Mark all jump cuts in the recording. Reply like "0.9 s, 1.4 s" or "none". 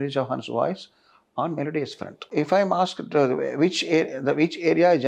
2.3 s

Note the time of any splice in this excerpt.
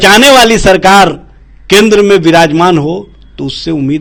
none

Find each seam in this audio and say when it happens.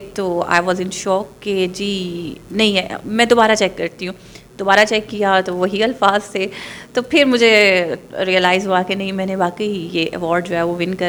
none

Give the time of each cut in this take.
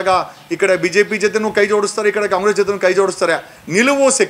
none

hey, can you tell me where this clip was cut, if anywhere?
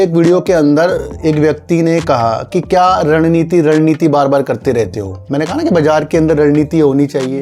none

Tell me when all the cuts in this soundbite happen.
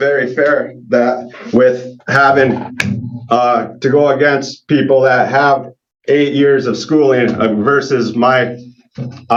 none

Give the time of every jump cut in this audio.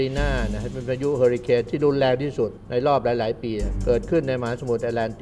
2.6 s, 3.7 s

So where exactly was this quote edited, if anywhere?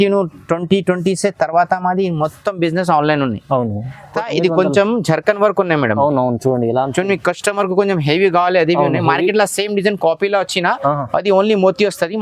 4.2 s

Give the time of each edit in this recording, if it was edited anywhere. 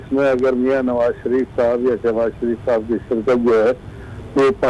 none

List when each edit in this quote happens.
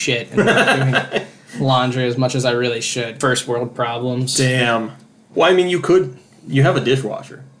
3.1 s

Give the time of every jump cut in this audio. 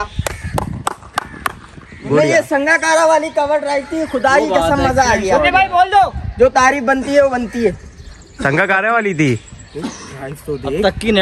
none

